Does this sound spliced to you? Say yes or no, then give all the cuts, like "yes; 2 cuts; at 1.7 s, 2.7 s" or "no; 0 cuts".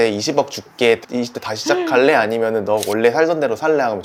no; 0 cuts